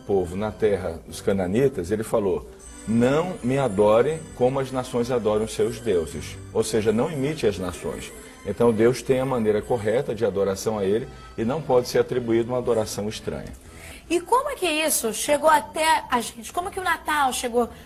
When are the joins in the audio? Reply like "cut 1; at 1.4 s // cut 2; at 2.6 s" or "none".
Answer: none